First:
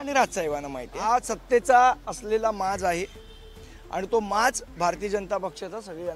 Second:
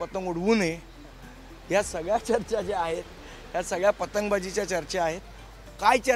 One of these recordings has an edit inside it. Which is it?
first; 1 cut; at 1.0 s

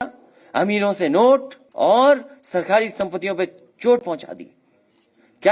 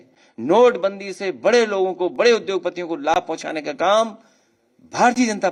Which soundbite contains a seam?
first; 1 cut; at 1.6 s

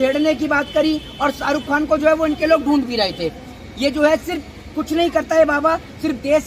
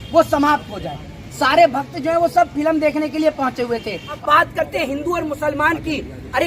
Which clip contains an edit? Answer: second; 2 cuts; at 1.2 s, 4.2 s

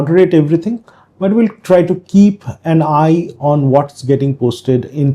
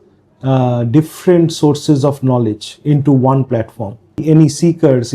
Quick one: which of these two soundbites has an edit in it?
second; 1 cut; at 4.2 s

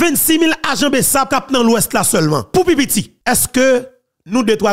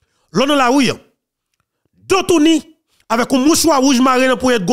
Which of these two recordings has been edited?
first; 3 cuts; at 1.3 s, 2.5 s, 3.1 s

